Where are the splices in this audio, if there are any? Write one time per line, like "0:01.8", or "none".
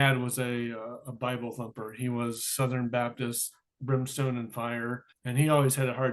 0:05.1

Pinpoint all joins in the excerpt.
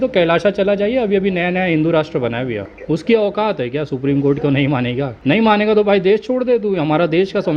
0:02.7
0:05.1

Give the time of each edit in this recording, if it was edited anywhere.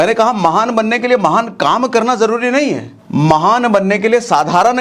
0:02.9

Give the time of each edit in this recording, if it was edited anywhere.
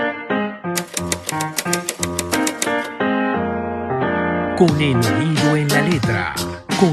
none

